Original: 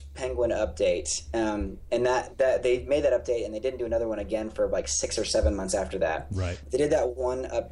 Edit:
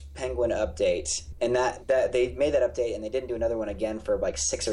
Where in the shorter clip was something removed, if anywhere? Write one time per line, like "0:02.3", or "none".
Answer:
0:01.2